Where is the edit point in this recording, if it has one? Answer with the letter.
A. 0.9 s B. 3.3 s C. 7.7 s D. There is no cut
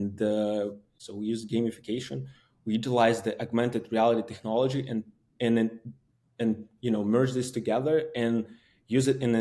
A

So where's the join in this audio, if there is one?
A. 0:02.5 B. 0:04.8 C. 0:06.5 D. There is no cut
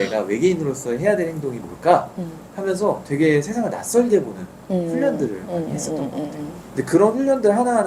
D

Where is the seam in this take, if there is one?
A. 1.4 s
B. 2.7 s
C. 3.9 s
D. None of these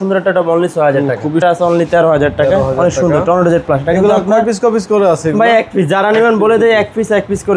A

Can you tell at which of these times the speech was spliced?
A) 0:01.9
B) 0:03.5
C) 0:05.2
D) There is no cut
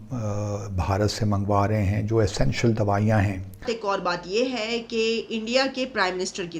B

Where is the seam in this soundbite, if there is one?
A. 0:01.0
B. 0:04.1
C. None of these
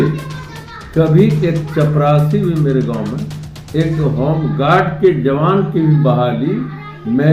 C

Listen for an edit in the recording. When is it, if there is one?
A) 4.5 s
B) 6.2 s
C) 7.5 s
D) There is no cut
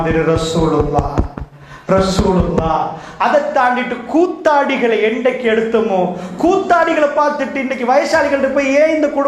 B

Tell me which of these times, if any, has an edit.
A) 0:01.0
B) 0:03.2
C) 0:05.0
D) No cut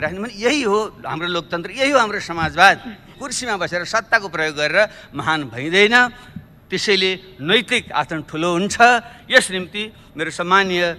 B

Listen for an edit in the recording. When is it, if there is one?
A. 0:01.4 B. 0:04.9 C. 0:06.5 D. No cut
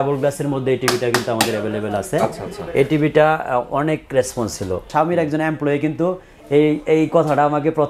B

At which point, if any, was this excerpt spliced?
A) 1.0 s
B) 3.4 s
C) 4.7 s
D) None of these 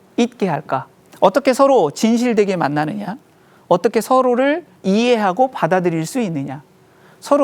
A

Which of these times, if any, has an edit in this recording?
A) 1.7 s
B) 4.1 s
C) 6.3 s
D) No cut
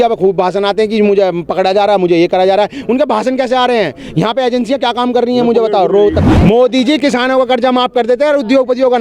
C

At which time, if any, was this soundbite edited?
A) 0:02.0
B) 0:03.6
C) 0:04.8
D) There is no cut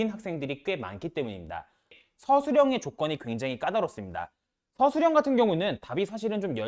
A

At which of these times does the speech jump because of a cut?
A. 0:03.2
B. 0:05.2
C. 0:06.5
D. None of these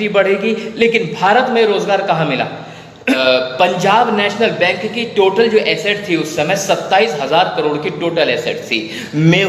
A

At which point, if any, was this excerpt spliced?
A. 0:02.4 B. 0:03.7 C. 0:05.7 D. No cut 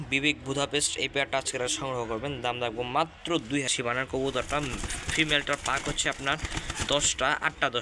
B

